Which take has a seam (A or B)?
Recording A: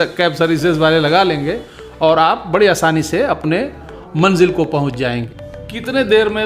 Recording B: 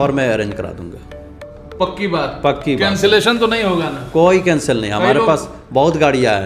A